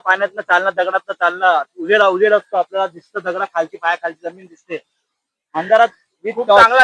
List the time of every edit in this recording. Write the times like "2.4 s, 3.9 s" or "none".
none

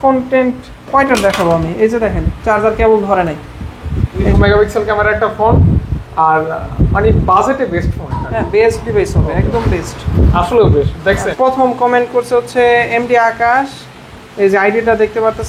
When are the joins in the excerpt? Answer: 4.3 s, 11.3 s

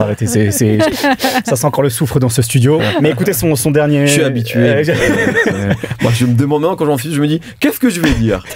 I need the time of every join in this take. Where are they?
none

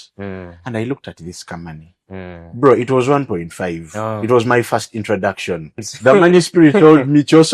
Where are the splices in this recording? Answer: 5.9 s

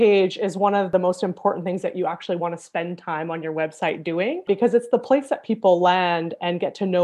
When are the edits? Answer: 0.9 s

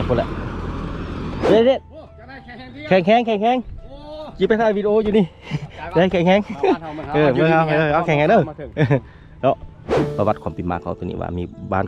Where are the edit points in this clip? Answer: 1.4 s, 9.8 s

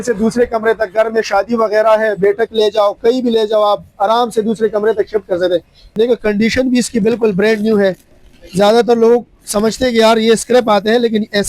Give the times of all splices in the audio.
5.9 s

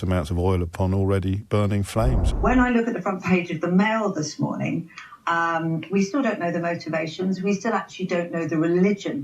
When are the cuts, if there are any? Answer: 2.2 s

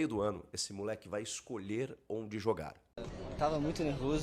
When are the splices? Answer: 3.0 s

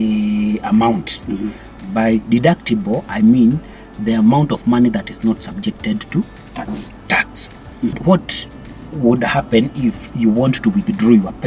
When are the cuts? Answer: 8.0 s

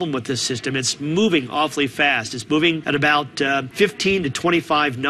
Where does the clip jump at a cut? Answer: 2.8 s, 3.7 s

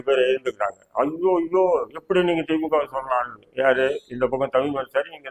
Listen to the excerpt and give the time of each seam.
none

